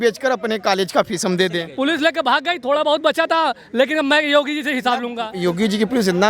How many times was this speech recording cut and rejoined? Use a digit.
2